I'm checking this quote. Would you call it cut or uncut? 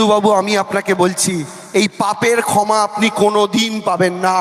uncut